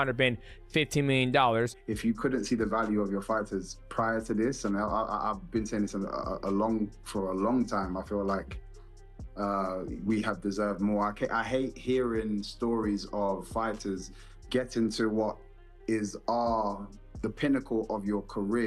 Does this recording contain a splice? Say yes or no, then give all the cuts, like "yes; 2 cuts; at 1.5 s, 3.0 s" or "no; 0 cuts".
yes; 1 cut; at 1.8 s